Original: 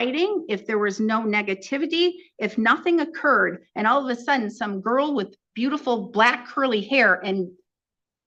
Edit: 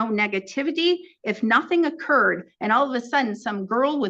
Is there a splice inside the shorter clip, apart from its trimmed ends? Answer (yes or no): no